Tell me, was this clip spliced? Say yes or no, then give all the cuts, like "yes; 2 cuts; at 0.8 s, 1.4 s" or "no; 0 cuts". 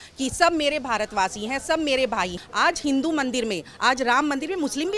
yes; 1 cut; at 2.4 s